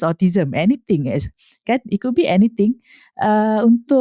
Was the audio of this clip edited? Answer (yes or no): no